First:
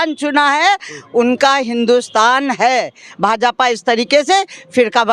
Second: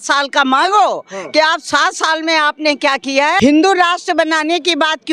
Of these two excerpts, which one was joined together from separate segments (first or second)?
second